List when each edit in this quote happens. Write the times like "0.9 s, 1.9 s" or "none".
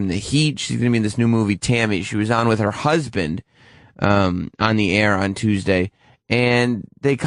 none